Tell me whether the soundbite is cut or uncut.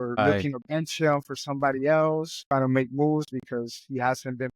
cut